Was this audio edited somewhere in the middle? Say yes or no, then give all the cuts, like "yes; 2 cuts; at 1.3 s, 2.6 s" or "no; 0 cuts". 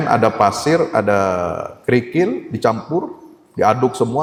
no; 0 cuts